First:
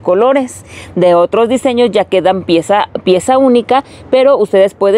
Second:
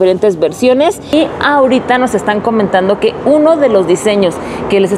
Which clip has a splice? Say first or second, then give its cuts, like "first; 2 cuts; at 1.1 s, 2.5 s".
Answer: second; 1 cut; at 1.1 s